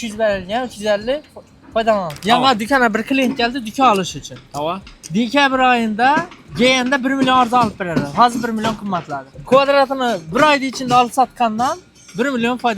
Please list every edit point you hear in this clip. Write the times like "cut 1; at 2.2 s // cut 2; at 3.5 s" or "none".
cut 1; at 2.2 s // cut 2; at 6.4 s // cut 3; at 9.3 s